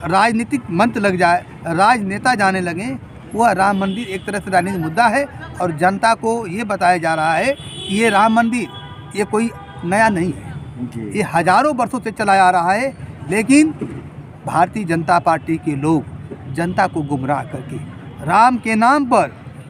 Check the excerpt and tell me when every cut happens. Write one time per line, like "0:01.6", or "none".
none